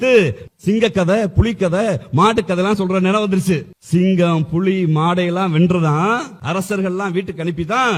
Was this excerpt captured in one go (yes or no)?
yes